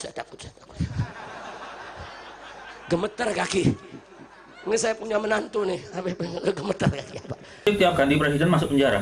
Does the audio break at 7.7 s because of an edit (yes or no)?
yes